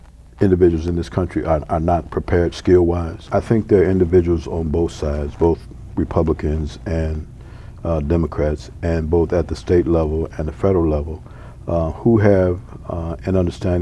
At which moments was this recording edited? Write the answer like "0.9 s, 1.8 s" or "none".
3.3 s